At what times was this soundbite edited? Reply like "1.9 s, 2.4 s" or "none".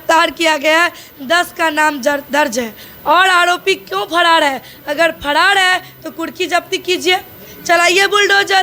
2.9 s

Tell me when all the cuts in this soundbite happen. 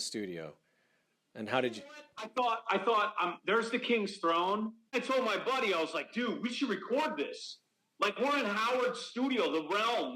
4.9 s

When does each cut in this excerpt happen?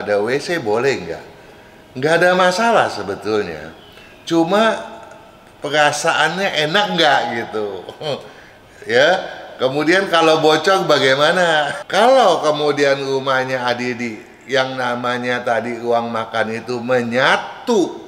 11.8 s

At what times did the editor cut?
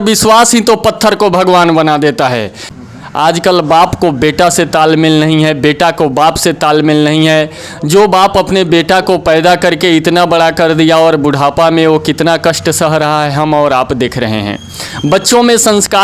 2.6 s

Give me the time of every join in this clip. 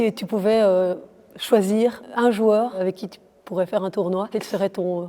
2.0 s, 2.8 s, 4.3 s

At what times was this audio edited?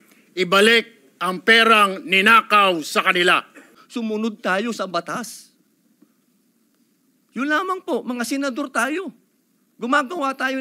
3.8 s

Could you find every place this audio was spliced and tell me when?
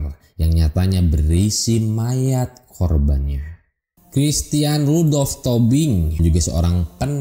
6.1 s

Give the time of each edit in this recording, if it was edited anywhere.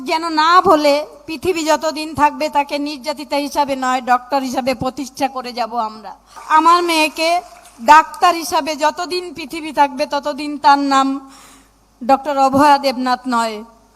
6.4 s

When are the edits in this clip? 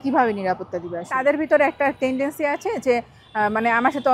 1.1 s

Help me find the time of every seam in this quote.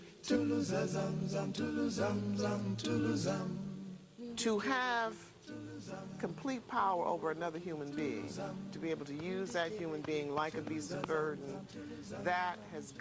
4.4 s

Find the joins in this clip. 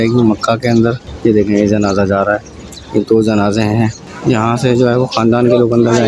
1.1 s, 4.1 s

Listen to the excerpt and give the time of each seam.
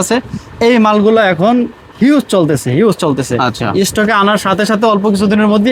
none

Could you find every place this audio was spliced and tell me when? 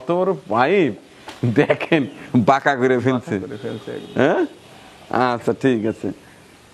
none

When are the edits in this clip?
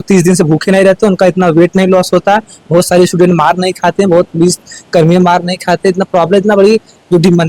none

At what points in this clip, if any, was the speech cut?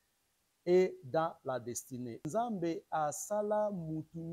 2.2 s

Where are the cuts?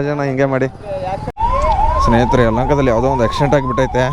1.3 s

